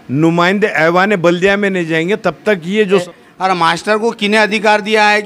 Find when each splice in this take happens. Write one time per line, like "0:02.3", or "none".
0:03.0